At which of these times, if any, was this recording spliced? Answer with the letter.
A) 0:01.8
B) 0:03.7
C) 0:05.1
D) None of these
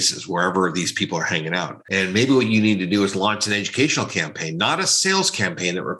A